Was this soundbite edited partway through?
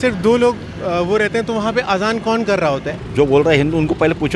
yes; 1 cut; at 2.9 s

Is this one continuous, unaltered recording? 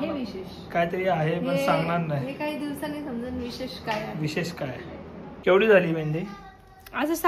no; 1 cut; at 5.2 s

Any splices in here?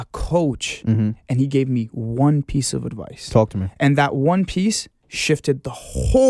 no; 0 cuts

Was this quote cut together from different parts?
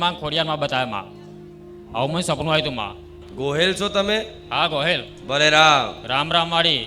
yes; 1 cut; at 3.2 s

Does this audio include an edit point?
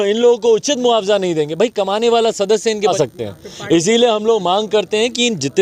yes; 1 cut; at 2.9 s

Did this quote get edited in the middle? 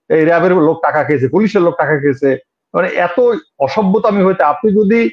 no; 0 cuts

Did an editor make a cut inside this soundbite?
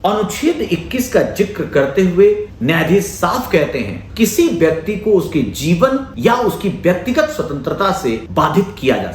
yes; 4 cuts; at 2.5 s, 4.0 s, 6.1 s, 8.2 s

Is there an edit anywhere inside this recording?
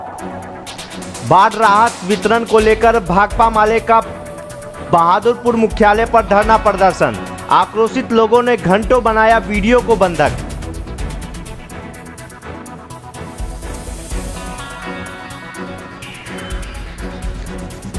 no; 0 cuts

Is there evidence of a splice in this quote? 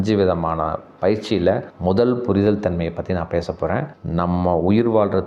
yes; 1 cut; at 3.9 s

